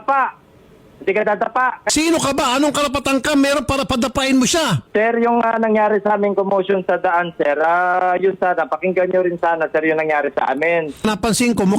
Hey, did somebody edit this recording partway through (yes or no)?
yes